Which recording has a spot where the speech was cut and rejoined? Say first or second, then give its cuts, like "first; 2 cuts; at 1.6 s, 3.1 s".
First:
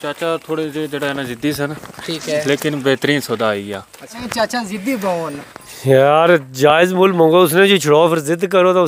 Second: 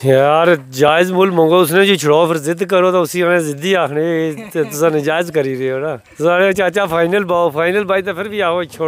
first; 1 cut; at 4.2 s